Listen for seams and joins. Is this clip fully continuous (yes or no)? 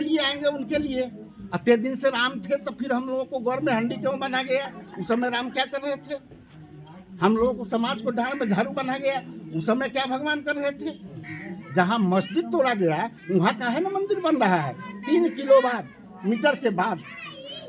no